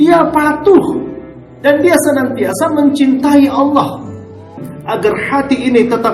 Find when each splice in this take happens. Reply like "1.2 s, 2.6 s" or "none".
4.7 s